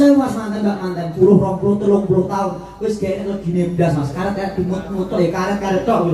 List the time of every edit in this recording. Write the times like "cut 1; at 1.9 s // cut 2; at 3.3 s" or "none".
cut 1; at 1.1 s